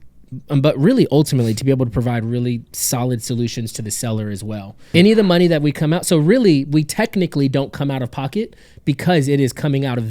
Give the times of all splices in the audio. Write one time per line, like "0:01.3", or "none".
0:04.9

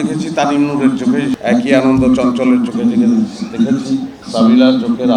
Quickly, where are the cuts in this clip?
0:01.4
0:04.2

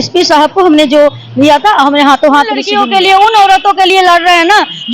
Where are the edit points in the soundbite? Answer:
0:02.7

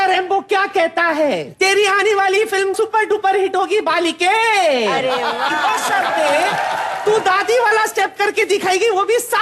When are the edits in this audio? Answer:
0:01.5

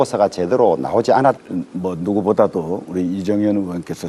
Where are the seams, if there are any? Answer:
none

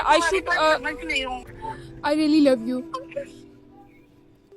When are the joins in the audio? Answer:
0:01.5
0:03.2

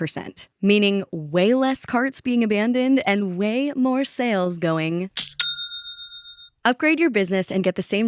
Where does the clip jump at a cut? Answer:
0:06.5

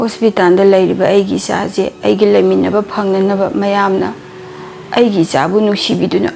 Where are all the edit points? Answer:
none

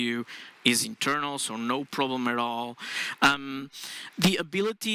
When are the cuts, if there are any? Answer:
none

